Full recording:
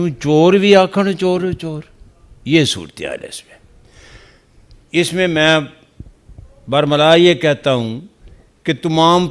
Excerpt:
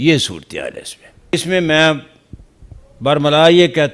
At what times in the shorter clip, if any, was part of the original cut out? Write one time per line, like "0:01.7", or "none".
0:01.3